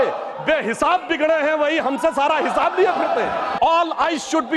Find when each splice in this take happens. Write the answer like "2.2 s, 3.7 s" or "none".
3.5 s